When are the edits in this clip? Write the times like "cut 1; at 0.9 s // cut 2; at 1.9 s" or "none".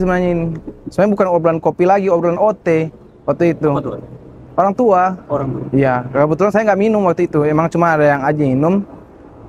none